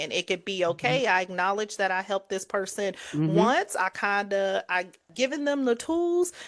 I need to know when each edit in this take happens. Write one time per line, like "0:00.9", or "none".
0:05.1